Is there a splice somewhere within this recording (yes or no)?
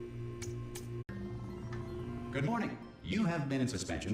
no